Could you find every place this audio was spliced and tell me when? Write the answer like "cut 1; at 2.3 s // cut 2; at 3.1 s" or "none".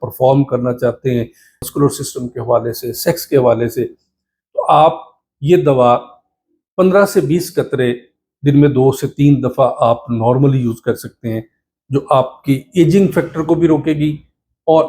cut 1; at 1.6 s